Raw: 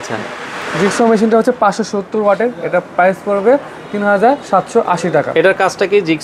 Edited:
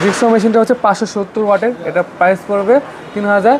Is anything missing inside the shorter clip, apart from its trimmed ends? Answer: no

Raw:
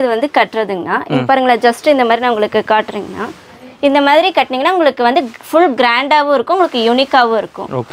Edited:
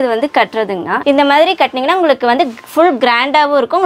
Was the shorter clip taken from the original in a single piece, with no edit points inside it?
no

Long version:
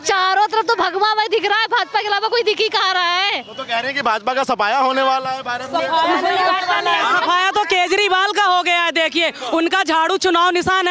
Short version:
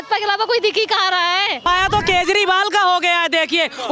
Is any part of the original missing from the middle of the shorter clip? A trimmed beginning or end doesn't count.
yes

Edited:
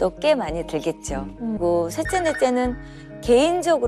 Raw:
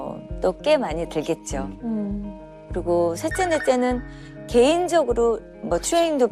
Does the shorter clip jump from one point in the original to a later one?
yes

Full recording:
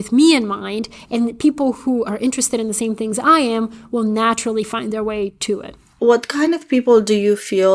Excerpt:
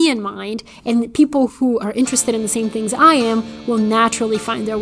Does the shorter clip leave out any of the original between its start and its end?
no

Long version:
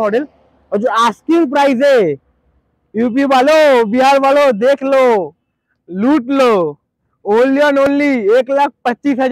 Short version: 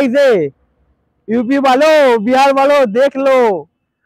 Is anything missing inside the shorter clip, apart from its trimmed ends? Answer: no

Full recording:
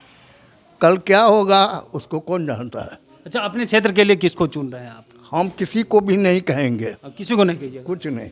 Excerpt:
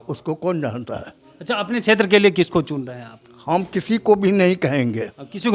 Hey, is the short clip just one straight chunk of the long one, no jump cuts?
yes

